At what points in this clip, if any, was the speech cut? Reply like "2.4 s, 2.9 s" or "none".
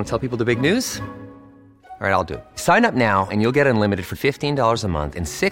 none